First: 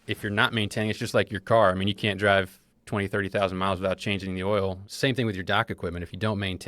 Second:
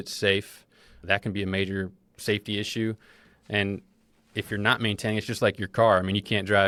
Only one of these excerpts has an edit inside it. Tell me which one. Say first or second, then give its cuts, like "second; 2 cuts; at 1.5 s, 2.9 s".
first; 1 cut; at 4.9 s